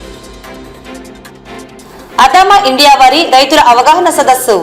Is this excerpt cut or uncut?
cut